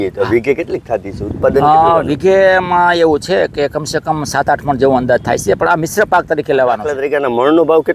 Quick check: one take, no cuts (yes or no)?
no